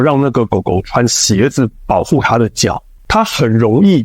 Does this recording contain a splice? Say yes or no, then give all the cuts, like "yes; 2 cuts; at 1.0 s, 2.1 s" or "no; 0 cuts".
yes; 1 cut; at 2.9 s